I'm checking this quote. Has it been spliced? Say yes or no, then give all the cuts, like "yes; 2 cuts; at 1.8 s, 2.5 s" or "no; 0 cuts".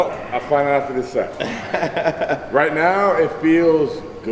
no; 0 cuts